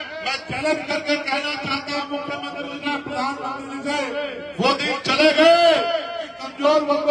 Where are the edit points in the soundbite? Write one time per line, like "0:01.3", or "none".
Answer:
none